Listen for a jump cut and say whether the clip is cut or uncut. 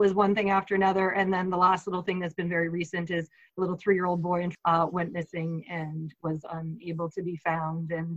cut